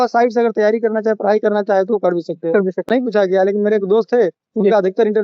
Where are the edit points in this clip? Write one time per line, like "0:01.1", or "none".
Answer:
0:02.9